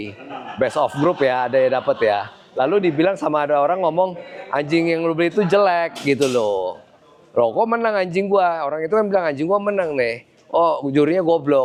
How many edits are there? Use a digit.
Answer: 0